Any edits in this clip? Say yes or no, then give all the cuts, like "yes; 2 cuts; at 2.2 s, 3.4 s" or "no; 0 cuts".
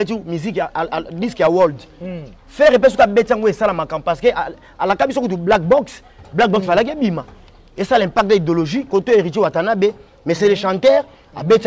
no; 0 cuts